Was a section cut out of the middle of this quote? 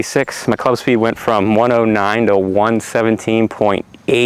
no; 0 cuts

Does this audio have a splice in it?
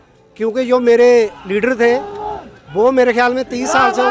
no; 0 cuts

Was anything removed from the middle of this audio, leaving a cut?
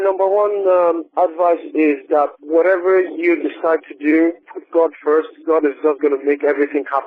yes; 1 cut; at 4.5 s

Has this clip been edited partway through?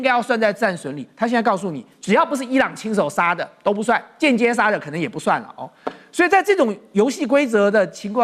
no; 0 cuts

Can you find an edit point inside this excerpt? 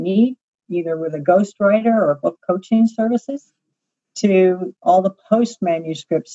no; 0 cuts

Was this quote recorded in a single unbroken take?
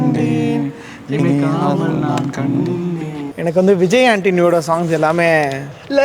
no; 1 cut; at 3.2 s

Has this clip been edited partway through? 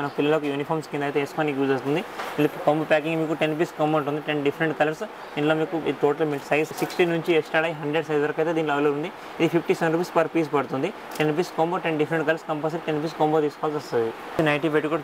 no; 0 cuts

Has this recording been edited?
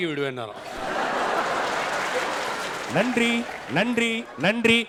no; 0 cuts

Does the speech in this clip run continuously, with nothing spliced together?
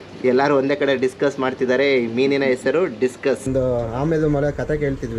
no; 1 cut; at 3.5 s

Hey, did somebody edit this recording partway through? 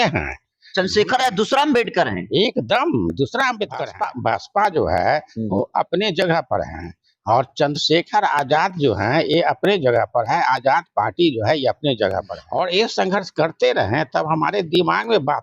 yes; 2 cuts; at 3.8 s, 12.4 s

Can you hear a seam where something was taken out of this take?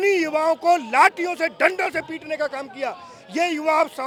no; 0 cuts

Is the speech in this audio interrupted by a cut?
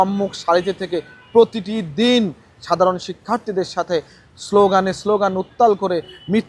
no; 0 cuts

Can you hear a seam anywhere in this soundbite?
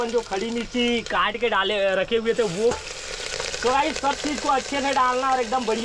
no; 0 cuts

